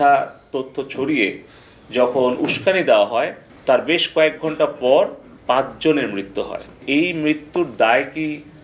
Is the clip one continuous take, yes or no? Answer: no